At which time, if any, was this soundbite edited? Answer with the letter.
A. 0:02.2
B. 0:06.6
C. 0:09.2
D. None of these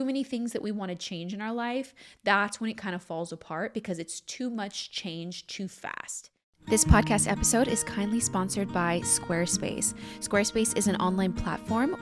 B